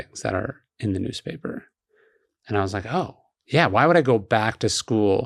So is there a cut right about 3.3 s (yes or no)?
no